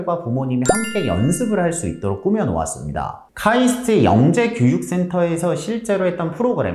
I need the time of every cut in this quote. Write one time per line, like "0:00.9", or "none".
none